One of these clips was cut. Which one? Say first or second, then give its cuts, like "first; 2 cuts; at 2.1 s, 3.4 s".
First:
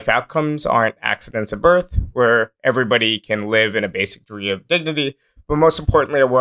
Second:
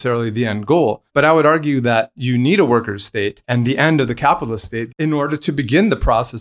second; 3 cuts; at 1.0 s, 3.4 s, 4.9 s